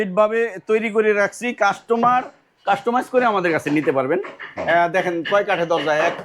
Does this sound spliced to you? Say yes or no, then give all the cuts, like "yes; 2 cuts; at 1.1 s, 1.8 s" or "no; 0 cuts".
no; 0 cuts